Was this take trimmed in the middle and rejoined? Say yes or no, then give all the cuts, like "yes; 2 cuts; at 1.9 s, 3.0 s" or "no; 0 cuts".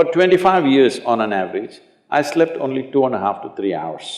no; 0 cuts